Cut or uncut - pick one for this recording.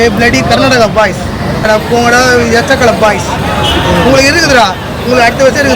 cut